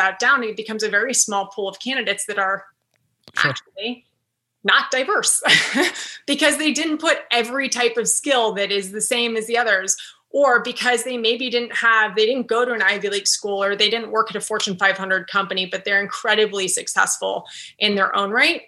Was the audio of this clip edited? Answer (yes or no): no